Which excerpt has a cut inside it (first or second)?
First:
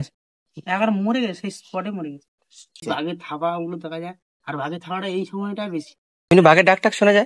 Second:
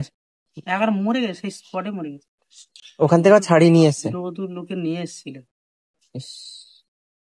first